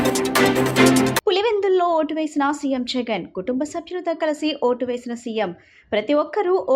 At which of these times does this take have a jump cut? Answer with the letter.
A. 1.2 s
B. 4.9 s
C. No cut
A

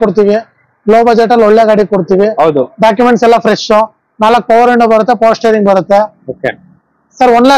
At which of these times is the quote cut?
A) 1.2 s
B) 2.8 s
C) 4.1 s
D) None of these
D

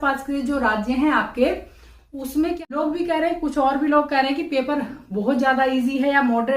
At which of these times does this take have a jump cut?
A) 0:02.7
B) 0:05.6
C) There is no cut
A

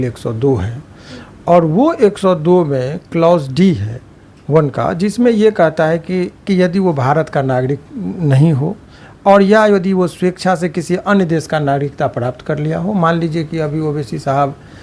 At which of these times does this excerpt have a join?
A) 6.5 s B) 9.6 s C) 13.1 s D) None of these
A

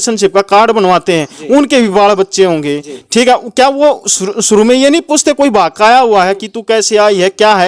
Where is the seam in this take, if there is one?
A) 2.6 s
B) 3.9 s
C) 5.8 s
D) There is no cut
D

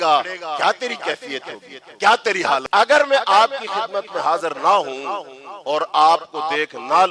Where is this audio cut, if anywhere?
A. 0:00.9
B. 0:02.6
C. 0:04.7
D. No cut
B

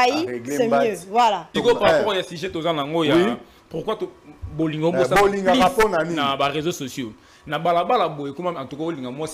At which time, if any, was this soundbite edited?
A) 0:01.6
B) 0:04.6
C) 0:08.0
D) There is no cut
A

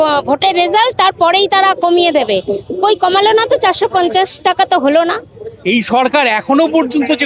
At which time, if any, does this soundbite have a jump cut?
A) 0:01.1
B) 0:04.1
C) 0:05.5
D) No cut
C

